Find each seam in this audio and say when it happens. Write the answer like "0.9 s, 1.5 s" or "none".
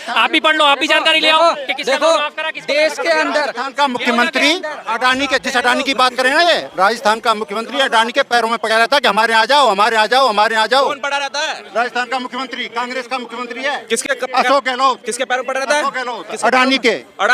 none